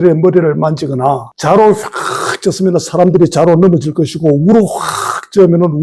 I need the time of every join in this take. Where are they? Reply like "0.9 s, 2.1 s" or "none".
1.3 s